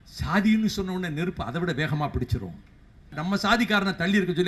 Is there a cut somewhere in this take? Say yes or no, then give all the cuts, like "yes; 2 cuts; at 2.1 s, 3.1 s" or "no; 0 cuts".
yes; 1 cut; at 3.2 s